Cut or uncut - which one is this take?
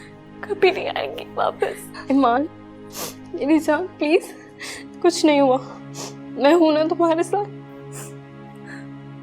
uncut